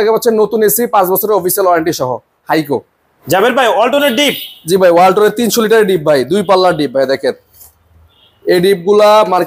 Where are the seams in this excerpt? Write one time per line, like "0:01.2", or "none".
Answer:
none